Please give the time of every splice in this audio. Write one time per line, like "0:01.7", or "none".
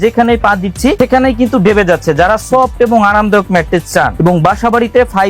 0:01.0
0:04.1